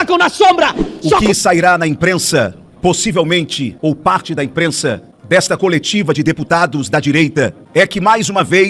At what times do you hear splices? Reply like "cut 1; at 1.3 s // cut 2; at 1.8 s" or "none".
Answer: cut 1; at 1.2 s // cut 2; at 3.7 s // cut 3; at 5.1 s // cut 4; at 7.6 s